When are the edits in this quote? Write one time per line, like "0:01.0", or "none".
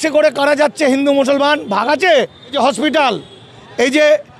0:02.5